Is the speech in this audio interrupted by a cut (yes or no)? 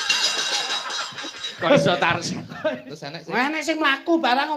yes